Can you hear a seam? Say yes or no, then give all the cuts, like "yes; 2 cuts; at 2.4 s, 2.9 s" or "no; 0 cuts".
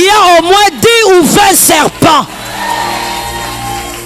no; 0 cuts